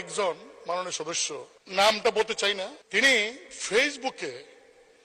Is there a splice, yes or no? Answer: yes